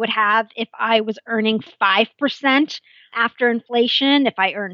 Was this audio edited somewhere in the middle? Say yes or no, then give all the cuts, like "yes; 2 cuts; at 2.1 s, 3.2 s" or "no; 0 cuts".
yes; 1 cut; at 3.2 s